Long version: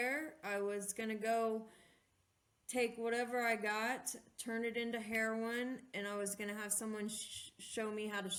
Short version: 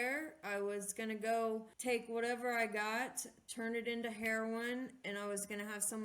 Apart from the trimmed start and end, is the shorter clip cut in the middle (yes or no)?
yes